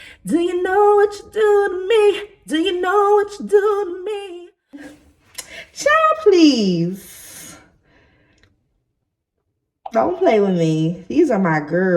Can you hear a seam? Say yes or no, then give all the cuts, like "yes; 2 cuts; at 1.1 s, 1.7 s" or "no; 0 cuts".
yes; 1 cut; at 4.9 s